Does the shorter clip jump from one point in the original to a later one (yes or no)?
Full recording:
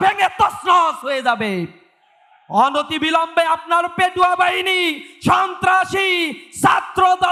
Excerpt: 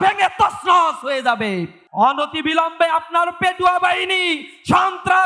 yes